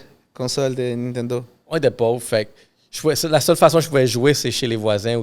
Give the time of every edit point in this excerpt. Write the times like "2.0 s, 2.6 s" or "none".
1.6 s